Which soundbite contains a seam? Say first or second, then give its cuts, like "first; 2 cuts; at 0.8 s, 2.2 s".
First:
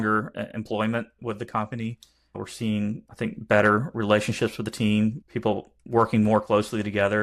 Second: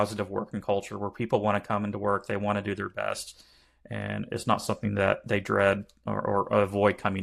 first; 4 cuts; at 1.2 s, 2.3 s, 3.1 s, 5.2 s